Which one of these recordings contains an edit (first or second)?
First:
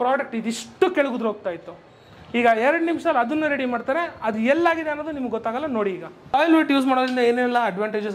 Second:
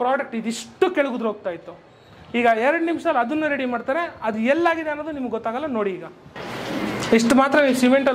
first